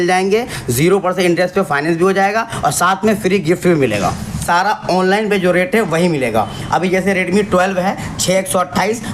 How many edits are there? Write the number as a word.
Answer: one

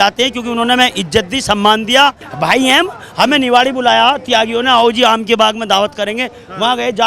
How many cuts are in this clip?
one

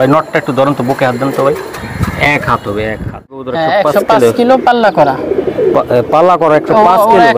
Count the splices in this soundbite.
one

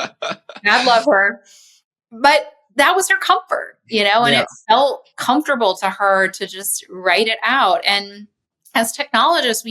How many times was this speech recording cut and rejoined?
one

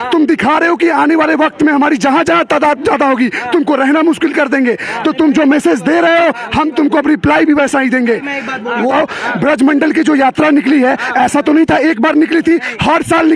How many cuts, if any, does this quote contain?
one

